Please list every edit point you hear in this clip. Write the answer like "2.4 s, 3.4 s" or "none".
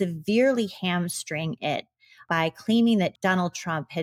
2.2 s, 3.2 s